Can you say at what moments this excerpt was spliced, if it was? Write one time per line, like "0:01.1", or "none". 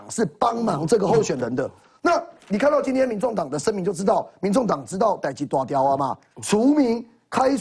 none